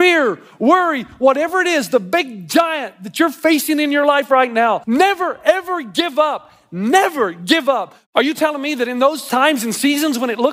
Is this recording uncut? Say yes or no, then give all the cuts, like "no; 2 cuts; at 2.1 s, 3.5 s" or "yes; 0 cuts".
no; 3 cuts; at 4.8 s, 7.9 s, 9.2 s